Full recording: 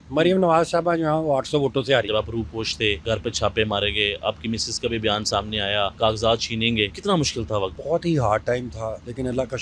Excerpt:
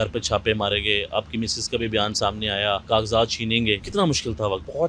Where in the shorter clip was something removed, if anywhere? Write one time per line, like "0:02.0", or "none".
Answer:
none